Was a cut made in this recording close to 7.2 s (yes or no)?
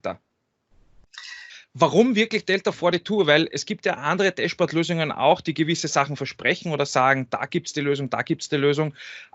no